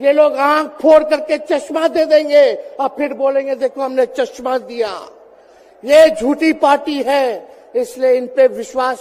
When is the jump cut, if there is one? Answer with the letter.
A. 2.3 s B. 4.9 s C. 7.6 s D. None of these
D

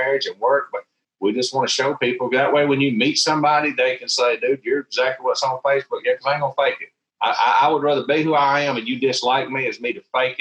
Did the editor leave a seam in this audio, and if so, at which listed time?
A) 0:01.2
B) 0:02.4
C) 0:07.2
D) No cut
D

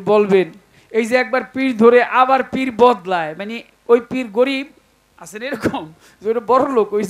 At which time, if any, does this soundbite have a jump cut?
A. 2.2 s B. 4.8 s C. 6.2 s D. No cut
D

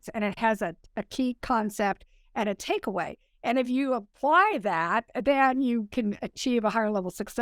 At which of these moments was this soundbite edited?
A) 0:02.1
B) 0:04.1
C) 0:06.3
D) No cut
B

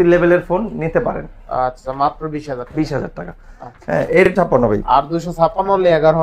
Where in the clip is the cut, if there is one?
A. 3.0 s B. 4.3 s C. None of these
B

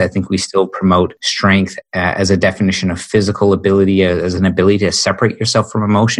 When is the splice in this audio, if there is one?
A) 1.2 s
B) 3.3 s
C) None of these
A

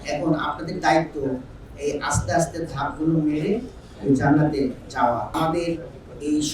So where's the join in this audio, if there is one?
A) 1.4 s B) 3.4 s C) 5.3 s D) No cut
C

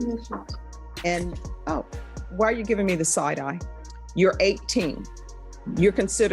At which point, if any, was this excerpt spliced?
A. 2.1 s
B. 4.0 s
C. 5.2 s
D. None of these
B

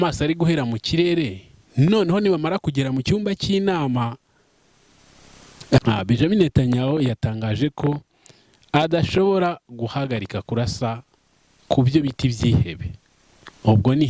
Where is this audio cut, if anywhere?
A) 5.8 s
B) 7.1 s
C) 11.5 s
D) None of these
A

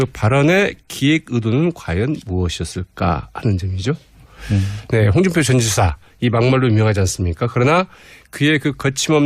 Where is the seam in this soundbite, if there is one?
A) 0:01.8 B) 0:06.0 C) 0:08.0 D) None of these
B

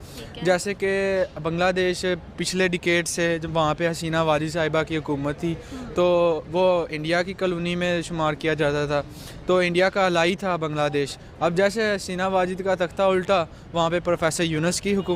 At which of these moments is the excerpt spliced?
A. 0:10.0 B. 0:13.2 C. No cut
C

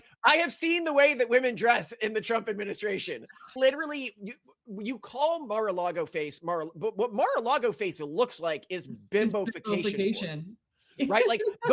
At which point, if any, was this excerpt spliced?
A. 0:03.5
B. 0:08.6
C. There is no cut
A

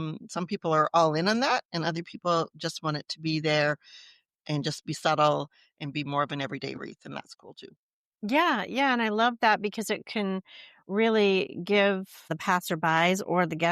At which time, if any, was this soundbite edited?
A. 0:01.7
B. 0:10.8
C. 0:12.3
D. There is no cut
C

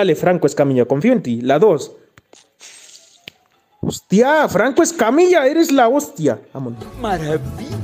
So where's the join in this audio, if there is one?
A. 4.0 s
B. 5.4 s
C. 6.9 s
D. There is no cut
C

